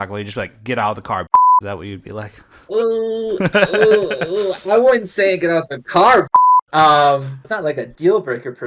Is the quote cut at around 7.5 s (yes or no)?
yes